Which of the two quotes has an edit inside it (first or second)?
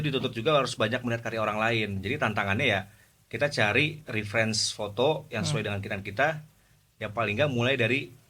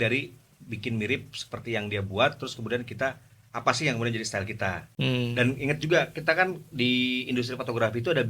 second